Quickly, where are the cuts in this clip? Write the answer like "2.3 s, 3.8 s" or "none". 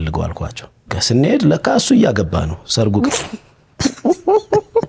0.9 s